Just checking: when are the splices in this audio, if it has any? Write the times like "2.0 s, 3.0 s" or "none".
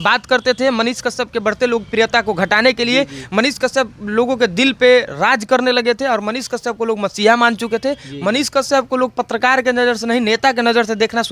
none

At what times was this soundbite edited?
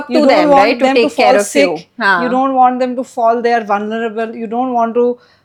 none

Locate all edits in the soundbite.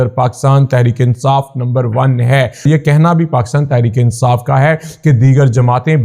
2.7 s

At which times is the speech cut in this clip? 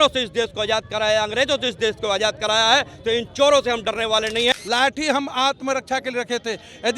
4.5 s

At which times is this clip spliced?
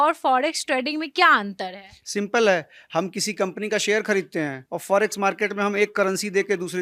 none

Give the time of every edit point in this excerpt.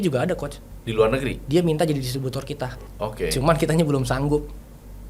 none

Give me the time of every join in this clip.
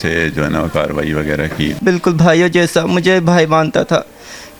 1.8 s

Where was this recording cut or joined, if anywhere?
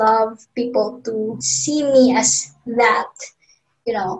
1.5 s

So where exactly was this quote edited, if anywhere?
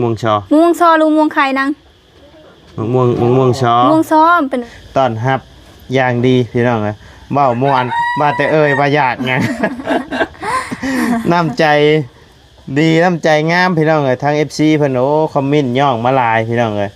4.7 s

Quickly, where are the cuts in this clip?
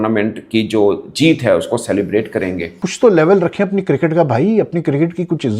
2.9 s

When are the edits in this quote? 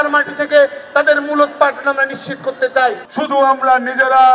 3.0 s

